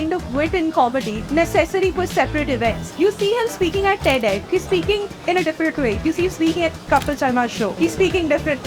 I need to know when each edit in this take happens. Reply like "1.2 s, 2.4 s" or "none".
1.2 s, 2.8 s, 4.4 s, 6.0 s, 7.7 s